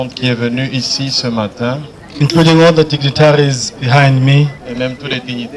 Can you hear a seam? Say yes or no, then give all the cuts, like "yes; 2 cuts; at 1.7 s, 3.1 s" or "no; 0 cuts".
no; 0 cuts